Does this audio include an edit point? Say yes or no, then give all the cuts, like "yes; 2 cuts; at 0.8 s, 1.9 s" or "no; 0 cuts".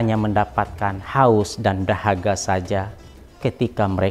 no; 0 cuts